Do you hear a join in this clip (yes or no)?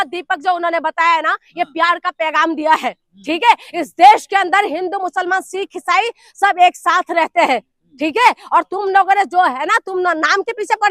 no